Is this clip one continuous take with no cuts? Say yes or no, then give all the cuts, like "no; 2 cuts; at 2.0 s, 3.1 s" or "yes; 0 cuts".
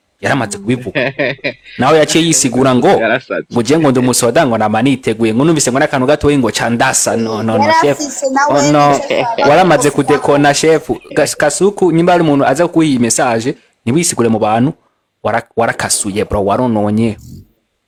yes; 0 cuts